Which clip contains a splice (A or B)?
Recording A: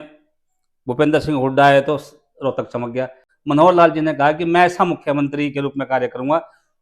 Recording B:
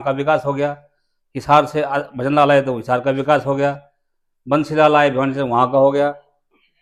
A